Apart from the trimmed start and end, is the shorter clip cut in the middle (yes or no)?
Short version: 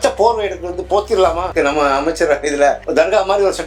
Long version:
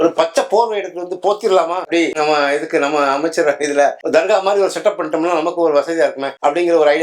yes